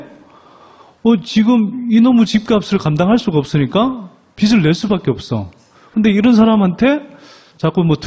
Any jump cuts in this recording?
no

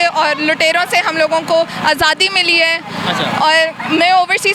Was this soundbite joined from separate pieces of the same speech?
no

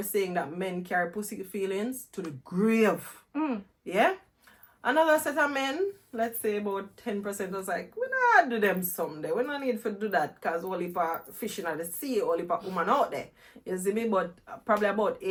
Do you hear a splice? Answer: no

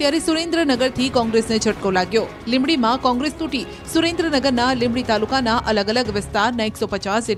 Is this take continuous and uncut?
yes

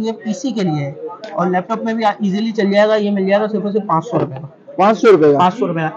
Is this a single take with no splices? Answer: yes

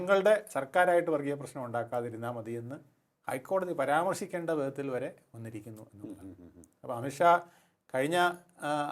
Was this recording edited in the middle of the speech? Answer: no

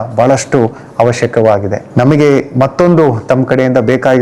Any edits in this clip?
no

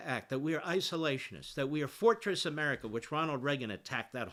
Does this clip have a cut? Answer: no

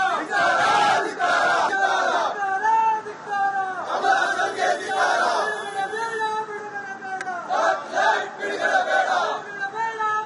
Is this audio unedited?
yes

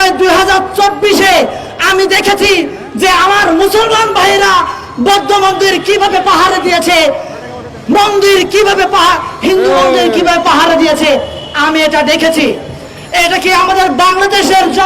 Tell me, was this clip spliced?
no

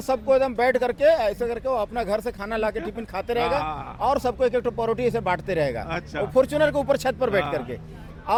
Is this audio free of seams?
yes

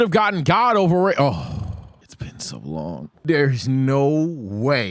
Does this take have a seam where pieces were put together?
no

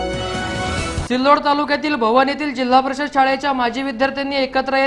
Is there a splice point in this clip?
no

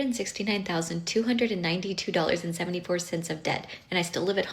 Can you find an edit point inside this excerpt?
no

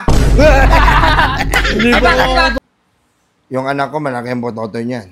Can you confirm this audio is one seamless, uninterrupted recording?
no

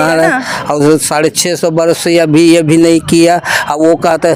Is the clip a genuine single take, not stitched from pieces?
yes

